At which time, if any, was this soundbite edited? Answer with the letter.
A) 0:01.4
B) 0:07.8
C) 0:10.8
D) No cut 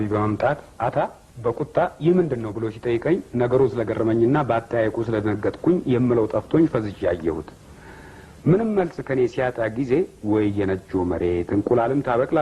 D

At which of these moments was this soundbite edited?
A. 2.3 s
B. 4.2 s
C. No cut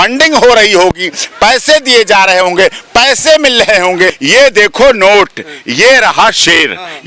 B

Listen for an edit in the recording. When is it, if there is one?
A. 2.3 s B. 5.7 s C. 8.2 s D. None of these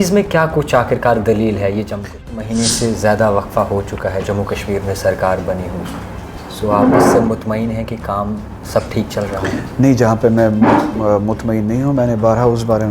A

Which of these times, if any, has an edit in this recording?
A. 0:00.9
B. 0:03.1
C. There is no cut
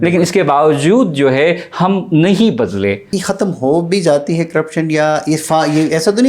B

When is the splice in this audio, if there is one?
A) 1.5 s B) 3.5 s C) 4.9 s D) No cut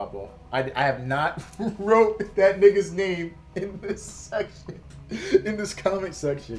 D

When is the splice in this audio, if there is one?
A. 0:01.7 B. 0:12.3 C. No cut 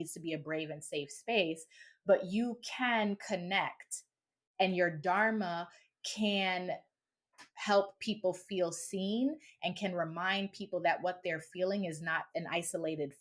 B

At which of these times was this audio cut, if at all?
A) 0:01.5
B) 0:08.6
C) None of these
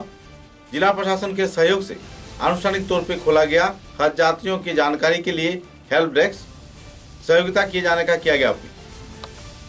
C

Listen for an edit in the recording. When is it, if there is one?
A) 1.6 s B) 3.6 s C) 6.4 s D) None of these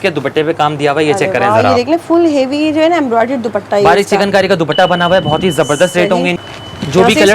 C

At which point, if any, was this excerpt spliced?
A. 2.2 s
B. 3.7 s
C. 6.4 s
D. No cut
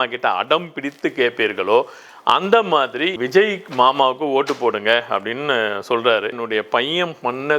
C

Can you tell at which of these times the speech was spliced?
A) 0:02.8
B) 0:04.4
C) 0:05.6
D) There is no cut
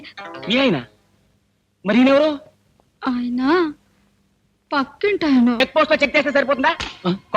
C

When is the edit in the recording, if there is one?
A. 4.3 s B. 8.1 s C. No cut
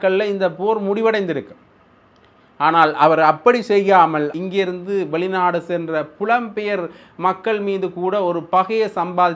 A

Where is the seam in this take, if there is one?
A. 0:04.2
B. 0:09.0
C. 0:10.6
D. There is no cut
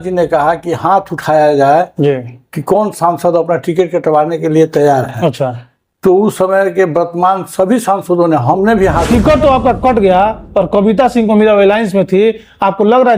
B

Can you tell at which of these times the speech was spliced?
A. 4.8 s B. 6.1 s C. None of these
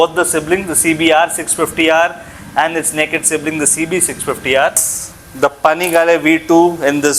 A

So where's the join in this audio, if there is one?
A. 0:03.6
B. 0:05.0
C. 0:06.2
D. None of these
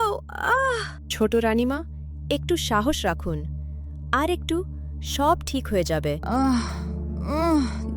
C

